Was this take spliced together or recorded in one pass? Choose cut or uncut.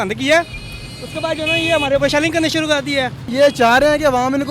cut